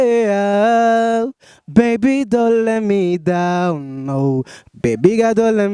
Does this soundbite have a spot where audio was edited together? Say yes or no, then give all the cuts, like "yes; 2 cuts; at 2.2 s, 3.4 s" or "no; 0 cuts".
no; 0 cuts